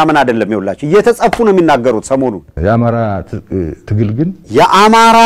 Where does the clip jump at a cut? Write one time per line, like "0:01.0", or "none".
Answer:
0:04.2